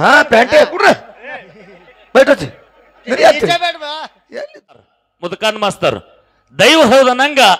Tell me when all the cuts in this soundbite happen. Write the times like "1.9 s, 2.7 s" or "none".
4.8 s